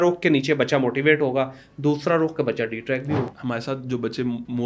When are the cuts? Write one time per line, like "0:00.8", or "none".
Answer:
0:03.3